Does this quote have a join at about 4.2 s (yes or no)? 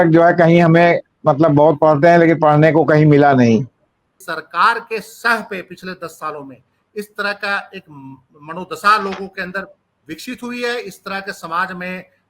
yes